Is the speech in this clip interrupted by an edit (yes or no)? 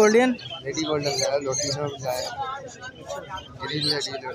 no